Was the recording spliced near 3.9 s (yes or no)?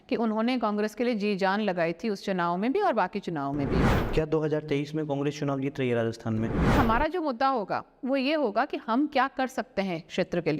yes